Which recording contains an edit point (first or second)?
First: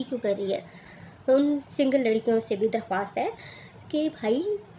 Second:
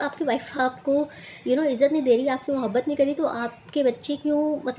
first